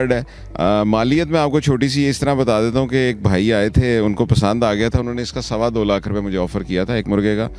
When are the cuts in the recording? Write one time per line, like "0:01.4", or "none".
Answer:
none